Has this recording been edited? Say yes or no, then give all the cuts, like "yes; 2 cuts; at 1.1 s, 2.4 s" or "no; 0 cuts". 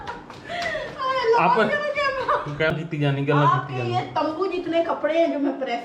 yes; 1 cut; at 2.7 s